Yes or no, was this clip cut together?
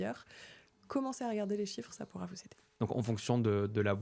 yes